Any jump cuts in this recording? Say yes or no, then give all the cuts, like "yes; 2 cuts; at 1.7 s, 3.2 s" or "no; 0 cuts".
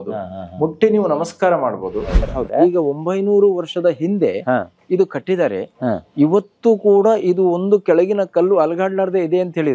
yes; 1 cut; at 2.3 s